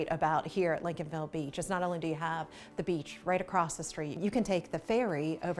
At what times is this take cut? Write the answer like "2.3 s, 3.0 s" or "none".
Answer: 4.1 s